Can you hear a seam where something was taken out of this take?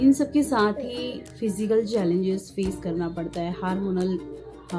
no; 0 cuts

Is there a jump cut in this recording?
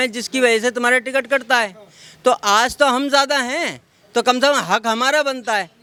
no; 0 cuts

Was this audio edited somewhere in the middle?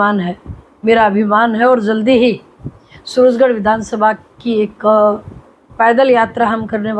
no; 0 cuts

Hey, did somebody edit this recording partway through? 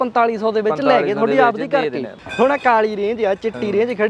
yes; 1 cut; at 2.2 s

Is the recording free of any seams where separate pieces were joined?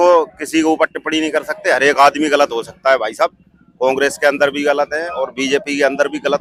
yes; 0 cuts

